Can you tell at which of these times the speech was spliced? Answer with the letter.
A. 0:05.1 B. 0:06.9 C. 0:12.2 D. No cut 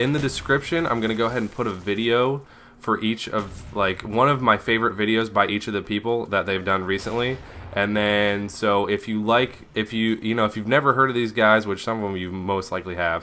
D